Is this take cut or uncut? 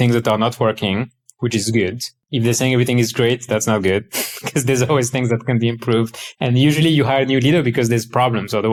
uncut